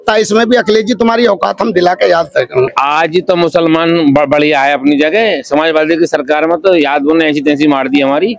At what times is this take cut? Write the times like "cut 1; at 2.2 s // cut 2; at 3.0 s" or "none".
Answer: cut 1; at 2.7 s